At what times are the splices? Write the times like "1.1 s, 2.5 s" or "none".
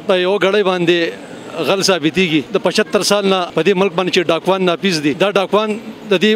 2.5 s, 3.5 s, 5.2 s